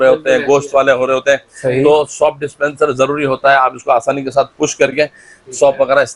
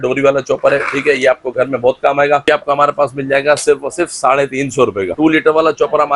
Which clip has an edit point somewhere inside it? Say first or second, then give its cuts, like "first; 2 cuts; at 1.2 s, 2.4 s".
second; 2 cuts; at 2.4 s, 5.1 s